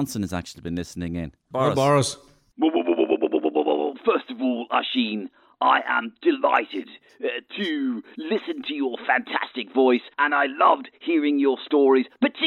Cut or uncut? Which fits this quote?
cut